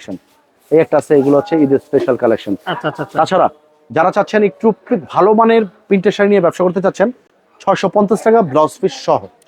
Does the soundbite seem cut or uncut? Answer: uncut